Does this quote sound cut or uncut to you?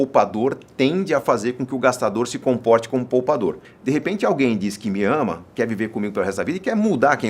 cut